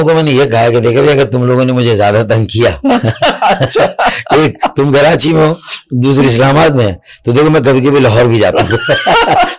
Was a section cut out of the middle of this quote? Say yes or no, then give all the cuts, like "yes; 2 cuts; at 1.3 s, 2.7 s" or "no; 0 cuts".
no; 0 cuts